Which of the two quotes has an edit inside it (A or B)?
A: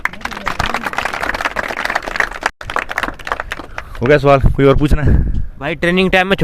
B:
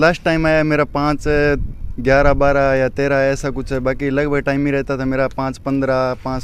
A